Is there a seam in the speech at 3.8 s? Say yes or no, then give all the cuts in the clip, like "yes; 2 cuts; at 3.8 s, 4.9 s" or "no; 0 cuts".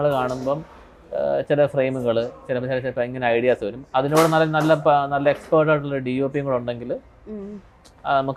no; 0 cuts